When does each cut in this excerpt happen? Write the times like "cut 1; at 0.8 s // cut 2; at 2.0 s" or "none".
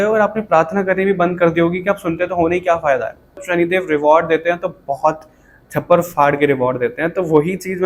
cut 1; at 3.4 s